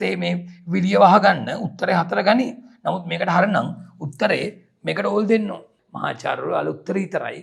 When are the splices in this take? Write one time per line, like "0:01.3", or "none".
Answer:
0:05.8

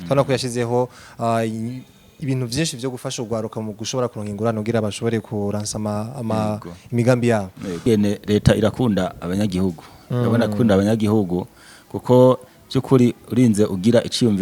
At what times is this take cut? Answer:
0:07.9

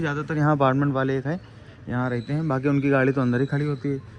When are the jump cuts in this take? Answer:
none

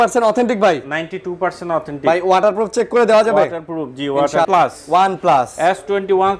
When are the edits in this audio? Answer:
0:04.5

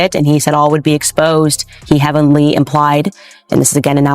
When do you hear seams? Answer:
0:01.7

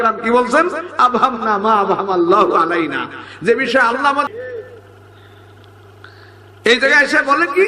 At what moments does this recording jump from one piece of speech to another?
0:04.2

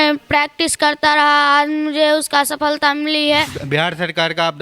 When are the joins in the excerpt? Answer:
0:03.6

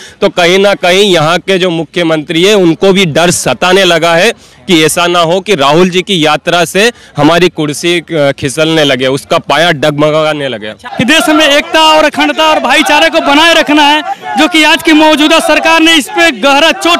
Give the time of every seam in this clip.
0:10.9

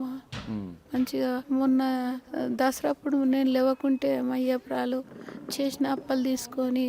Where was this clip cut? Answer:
0:01.4
0:02.2

